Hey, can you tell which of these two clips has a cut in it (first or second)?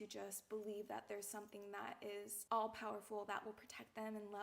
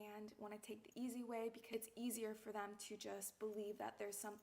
second